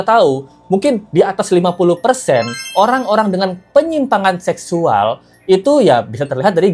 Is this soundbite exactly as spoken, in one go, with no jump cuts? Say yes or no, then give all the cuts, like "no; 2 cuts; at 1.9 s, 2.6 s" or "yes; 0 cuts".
yes; 0 cuts